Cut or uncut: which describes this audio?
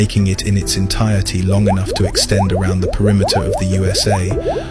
uncut